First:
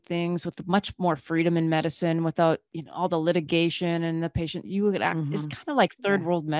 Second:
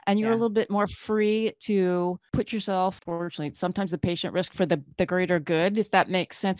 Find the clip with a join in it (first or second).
second